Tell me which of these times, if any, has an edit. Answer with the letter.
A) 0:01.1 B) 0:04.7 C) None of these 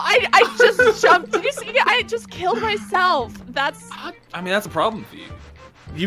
B